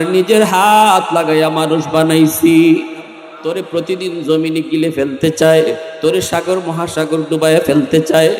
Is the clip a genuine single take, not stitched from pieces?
no; 1 cut; at 3.3 s

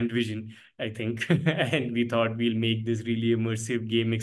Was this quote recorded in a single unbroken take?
yes; 0 cuts

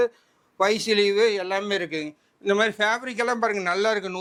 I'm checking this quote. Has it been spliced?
no; 0 cuts

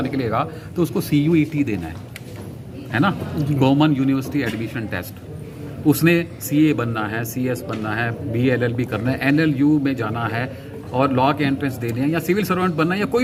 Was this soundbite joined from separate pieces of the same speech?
no; 0 cuts

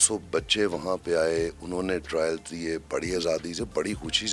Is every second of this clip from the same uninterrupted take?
yes; 0 cuts

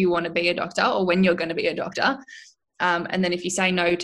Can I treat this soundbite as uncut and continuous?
yes; 0 cuts

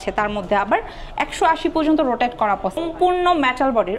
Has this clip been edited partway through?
yes; 1 cut; at 2.8 s

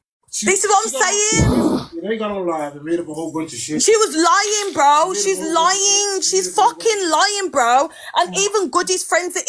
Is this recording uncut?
yes; 0 cuts

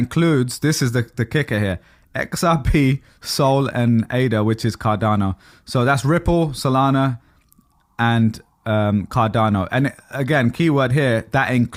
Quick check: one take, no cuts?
yes; 0 cuts

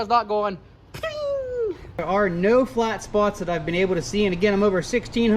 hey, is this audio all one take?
no; 1 cut; at 1.9 s

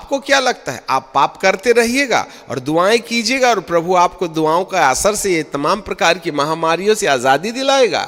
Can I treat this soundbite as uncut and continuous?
yes; 0 cuts

